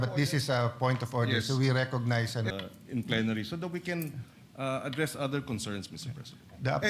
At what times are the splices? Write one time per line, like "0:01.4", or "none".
0:02.5